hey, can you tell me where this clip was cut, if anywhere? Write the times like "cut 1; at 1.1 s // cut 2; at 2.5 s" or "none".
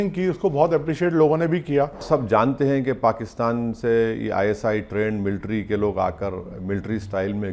cut 1; at 2.0 s

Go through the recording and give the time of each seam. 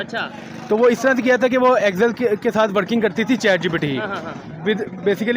none

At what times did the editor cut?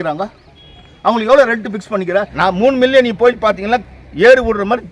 cut 1; at 2.3 s

